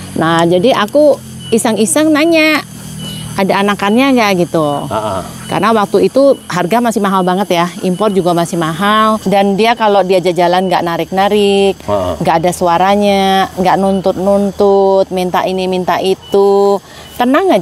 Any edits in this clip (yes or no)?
yes